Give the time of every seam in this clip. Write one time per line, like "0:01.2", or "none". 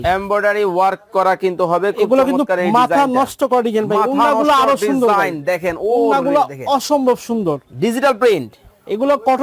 none